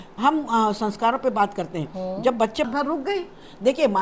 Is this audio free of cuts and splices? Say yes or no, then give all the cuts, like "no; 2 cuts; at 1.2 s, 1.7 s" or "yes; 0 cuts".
no; 1 cut; at 2.7 s